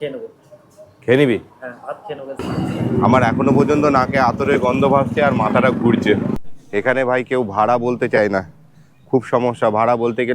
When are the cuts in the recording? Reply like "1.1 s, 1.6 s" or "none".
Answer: 2.4 s, 6.4 s